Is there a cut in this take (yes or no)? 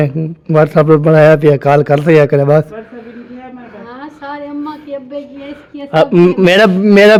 no